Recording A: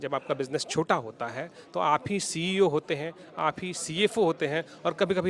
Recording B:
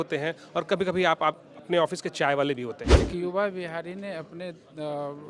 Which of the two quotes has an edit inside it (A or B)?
B